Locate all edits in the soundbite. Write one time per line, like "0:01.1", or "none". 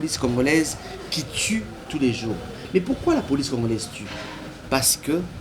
none